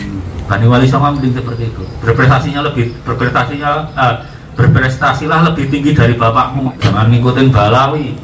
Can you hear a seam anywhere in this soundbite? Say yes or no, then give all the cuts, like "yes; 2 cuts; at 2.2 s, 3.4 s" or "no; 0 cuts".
yes; 1 cut; at 6.7 s